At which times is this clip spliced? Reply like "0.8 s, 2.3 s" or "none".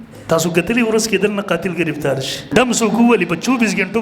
2.5 s